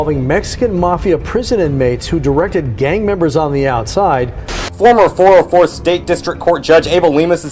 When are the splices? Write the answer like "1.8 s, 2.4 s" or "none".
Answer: 4.4 s

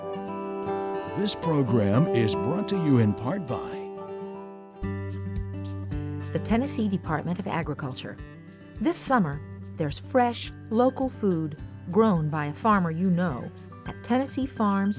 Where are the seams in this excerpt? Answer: 1.3 s

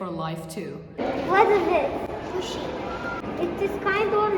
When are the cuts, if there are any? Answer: 1.0 s, 3.2 s

